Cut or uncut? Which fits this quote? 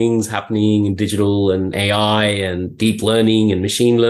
cut